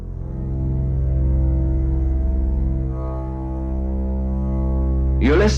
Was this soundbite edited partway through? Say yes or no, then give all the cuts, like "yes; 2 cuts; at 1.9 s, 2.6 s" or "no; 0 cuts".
no; 0 cuts